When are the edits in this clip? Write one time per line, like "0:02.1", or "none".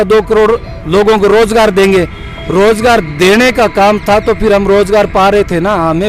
none